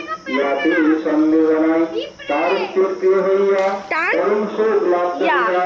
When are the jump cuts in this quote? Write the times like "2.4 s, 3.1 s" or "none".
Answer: none